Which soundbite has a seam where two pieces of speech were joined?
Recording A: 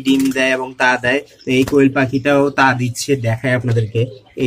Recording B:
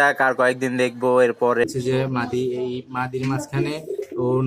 B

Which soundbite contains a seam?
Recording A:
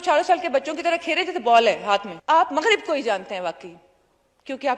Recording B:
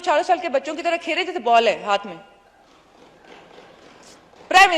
A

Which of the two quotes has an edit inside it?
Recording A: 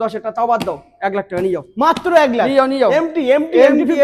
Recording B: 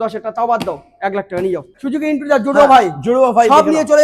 B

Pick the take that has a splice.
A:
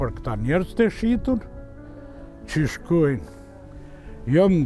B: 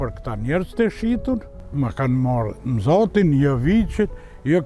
B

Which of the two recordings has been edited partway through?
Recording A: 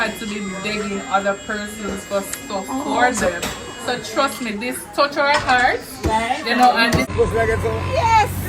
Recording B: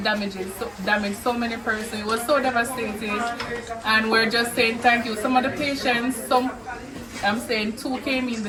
A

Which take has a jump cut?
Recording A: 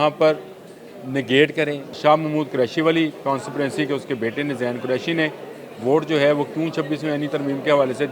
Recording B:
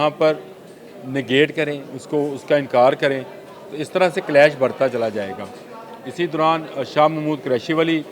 A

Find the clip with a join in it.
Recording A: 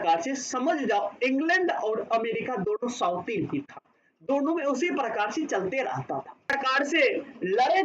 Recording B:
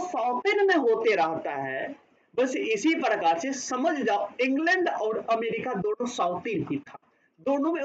A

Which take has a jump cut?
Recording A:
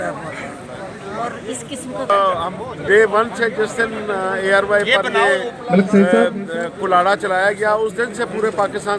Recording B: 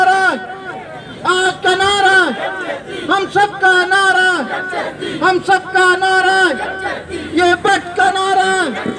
A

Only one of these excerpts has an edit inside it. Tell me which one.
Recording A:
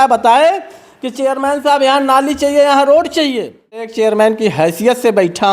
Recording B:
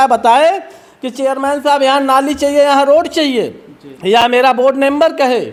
A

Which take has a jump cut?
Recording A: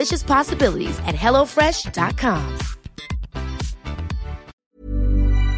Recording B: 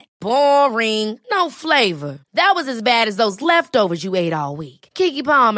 A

